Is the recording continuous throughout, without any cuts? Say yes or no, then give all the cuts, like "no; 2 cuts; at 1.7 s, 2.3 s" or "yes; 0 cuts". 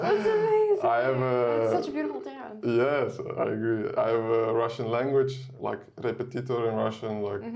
no; 1 cut; at 5.5 s